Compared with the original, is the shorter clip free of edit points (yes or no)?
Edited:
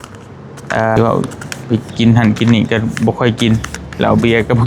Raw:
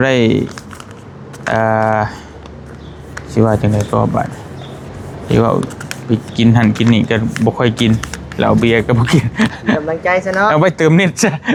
no